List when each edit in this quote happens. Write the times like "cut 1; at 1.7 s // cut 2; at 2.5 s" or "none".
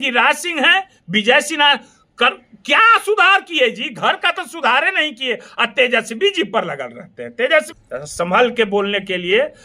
cut 1; at 7.8 s